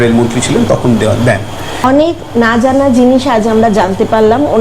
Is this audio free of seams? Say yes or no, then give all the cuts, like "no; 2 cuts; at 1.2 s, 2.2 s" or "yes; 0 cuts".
no; 1 cut; at 1.8 s